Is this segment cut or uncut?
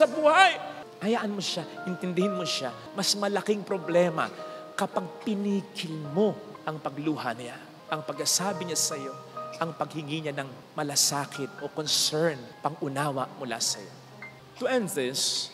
uncut